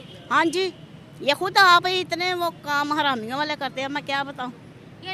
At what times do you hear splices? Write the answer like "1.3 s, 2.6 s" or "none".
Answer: none